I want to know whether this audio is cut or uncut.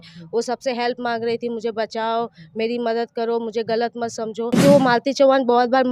cut